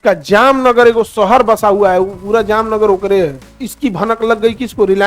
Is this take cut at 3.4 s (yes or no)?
yes